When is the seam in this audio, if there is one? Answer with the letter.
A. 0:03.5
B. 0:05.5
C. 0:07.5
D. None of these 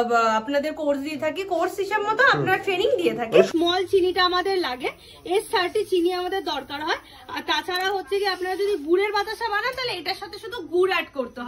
A